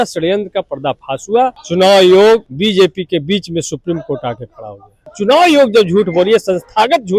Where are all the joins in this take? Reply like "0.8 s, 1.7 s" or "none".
1.6 s, 2.5 s, 5.1 s